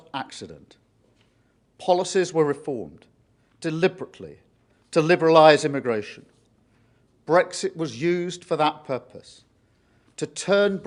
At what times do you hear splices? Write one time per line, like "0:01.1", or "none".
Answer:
none